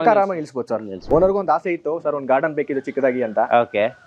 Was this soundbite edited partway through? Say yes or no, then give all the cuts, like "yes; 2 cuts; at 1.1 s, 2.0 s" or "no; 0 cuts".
yes; 1 cut; at 1.0 s